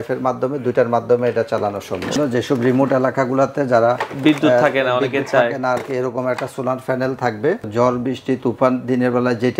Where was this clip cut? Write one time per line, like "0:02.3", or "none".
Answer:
0:02.1
0:07.6